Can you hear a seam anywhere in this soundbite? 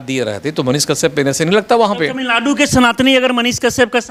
no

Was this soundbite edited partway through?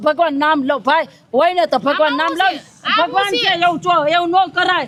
no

